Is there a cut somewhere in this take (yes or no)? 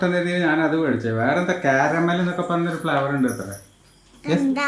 no